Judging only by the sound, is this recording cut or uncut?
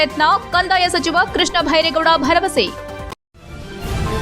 cut